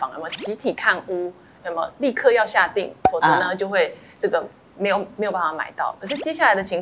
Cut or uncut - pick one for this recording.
uncut